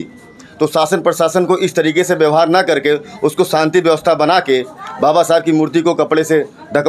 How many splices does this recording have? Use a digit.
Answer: 0